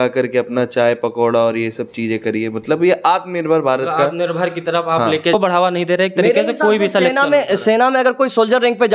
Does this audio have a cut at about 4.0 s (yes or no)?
no